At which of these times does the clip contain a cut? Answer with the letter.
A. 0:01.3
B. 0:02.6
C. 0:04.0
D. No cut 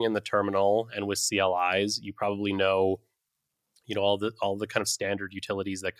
D